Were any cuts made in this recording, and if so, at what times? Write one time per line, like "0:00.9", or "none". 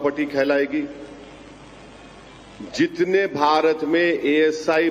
none